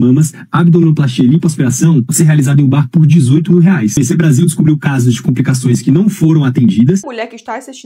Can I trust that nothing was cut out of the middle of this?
no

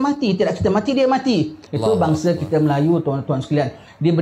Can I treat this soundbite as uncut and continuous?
no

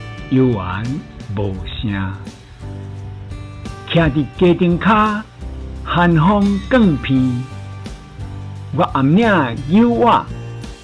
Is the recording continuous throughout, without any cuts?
yes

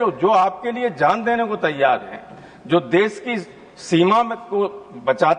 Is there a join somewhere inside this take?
no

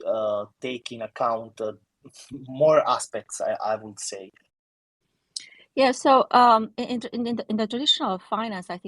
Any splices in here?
yes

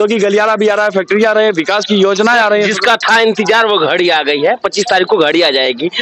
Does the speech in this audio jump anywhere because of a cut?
no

